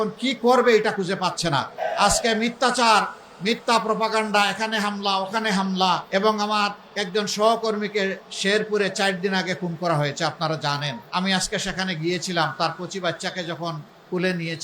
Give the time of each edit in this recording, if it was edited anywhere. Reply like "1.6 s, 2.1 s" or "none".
1.7 s, 6.0 s, 6.9 s, 11.0 s